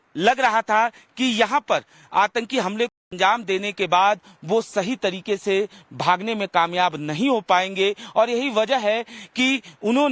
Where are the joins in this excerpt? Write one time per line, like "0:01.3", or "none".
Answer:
none